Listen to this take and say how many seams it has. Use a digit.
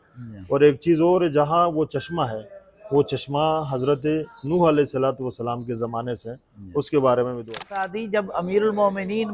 1